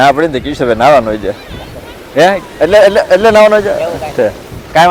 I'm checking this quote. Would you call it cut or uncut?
uncut